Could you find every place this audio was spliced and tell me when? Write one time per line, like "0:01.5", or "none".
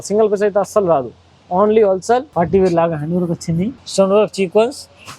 0:02.3
0:03.8